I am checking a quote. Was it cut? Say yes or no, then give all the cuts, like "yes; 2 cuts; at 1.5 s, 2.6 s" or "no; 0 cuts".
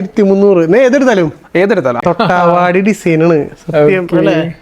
yes; 1 cut; at 2.0 s